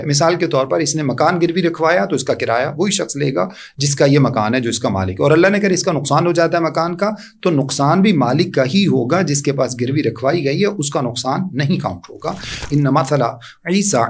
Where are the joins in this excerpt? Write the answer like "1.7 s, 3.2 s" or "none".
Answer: 12.6 s